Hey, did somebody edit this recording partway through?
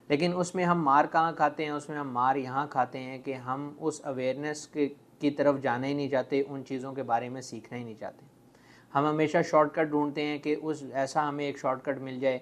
no; 0 cuts

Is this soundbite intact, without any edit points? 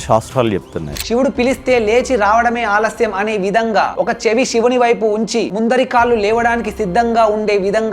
no; 1 cut; at 0.9 s

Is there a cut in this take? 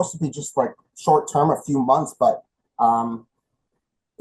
no; 0 cuts

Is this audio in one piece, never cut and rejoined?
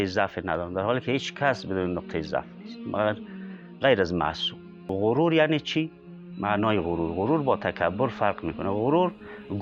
no; 1 cut; at 4.9 s

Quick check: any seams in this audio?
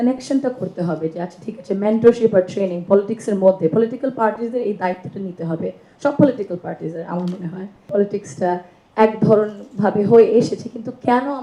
yes; 1 cut; at 7.8 s

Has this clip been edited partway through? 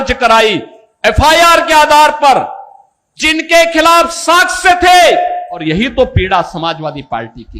yes; 1 cut; at 5.5 s

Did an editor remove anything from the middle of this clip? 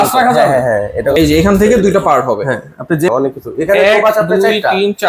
yes; 2 cuts; at 1.2 s, 3.1 s

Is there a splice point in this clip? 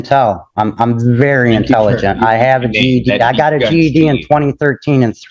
no; 0 cuts

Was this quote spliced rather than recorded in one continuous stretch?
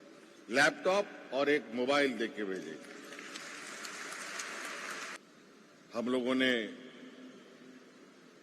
yes; 1 cut; at 5.2 s

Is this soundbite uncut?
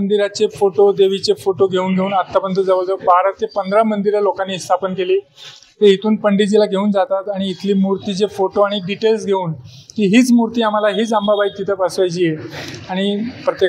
yes; 0 cuts

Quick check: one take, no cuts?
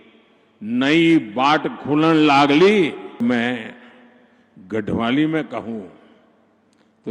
no; 1 cut; at 3.2 s

